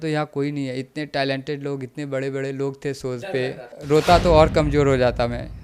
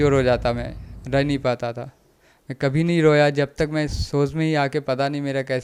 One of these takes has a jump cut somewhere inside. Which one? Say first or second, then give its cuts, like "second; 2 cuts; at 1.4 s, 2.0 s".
first; 1 cut; at 3.7 s